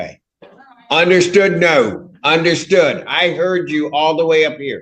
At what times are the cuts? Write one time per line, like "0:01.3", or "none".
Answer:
0:01.6